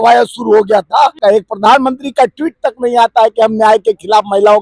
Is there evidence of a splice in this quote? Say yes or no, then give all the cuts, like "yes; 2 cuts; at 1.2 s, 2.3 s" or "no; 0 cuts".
yes; 1 cut; at 1.2 s